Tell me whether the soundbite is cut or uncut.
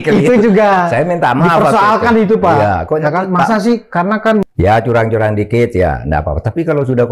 cut